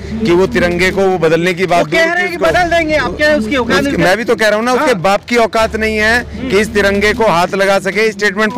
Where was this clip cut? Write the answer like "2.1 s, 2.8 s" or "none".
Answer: none